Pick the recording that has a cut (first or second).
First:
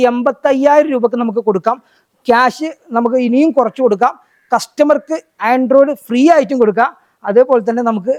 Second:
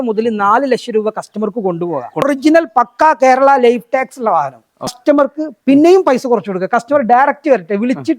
second